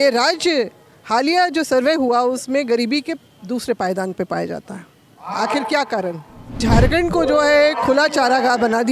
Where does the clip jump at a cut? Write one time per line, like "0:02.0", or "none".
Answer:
0:06.6